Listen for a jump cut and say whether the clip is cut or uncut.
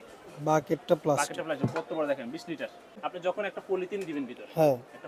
cut